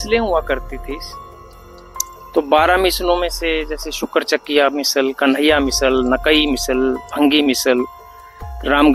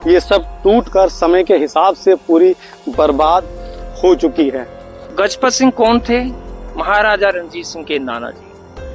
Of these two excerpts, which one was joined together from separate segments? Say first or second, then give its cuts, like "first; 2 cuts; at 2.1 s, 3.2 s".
second; 1 cut; at 5.1 s